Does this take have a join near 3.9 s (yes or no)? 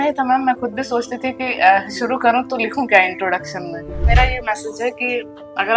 yes